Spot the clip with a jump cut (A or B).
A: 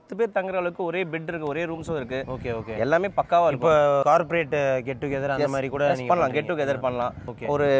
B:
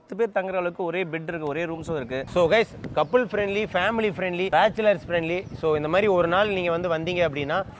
B